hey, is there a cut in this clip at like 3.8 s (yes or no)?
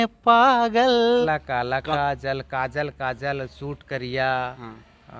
no